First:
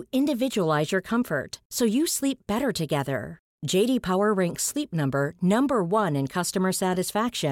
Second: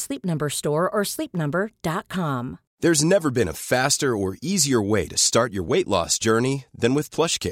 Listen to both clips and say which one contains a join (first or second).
second